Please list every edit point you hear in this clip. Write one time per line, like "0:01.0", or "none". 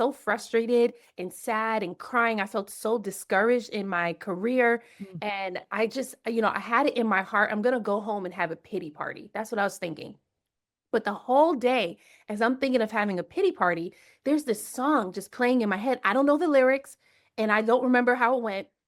none

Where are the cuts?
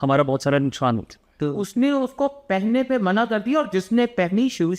0:01.6

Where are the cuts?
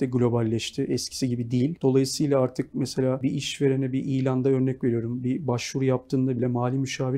0:01.8
0:03.2

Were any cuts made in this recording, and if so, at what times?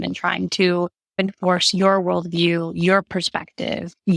0:01.1

